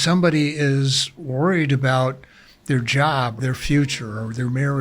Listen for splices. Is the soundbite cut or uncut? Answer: cut